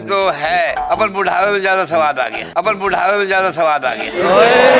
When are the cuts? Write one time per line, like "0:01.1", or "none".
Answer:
none